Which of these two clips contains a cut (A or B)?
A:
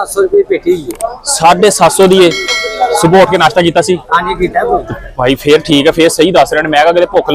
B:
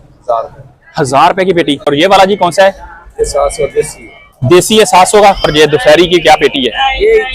B